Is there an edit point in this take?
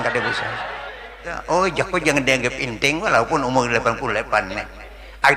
yes; 1 cut; at 1.3 s

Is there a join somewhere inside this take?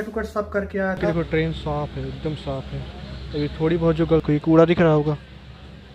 yes; 2 cuts; at 1.1 s, 4.2 s

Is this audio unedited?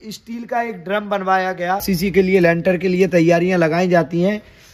no; 1 cut; at 1.8 s

